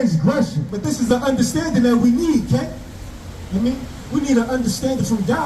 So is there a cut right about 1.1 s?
yes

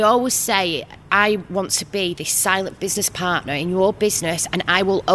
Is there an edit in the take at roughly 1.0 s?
yes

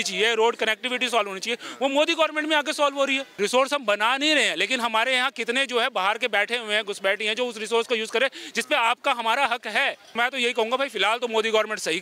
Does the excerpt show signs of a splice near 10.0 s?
yes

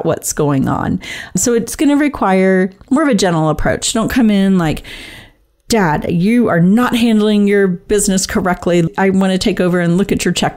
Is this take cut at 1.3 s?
yes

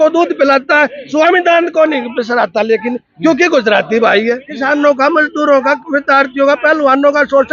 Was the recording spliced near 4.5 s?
yes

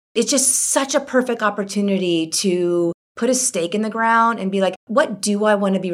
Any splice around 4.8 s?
yes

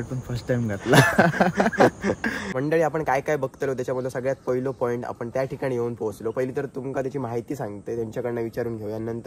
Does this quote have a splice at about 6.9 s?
no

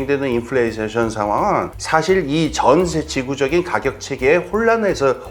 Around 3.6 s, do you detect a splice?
no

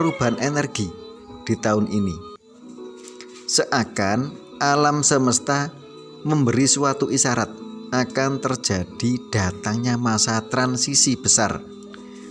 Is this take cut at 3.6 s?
yes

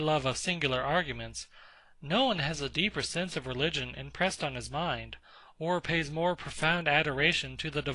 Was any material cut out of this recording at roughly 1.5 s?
no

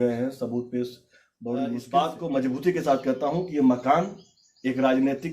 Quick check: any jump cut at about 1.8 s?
yes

